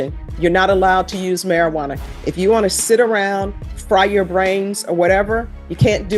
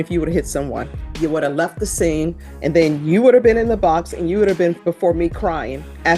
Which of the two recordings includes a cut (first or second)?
second